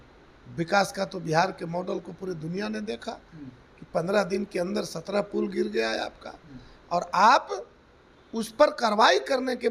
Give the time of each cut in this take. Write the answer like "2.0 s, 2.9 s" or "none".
none